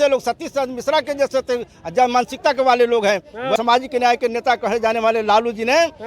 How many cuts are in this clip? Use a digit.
1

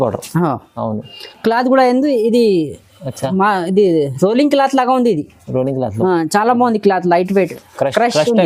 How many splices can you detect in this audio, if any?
0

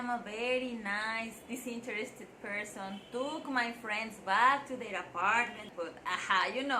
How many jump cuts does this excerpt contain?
1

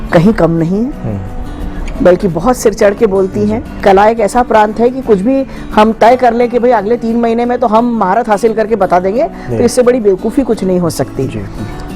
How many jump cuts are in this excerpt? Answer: 1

